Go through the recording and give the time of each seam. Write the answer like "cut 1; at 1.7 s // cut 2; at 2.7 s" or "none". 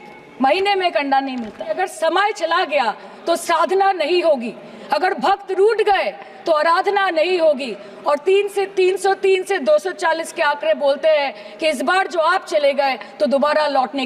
cut 1; at 1.8 s